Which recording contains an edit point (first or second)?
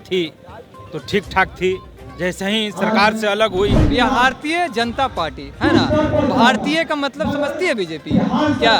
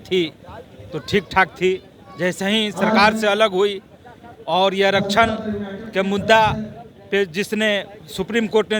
first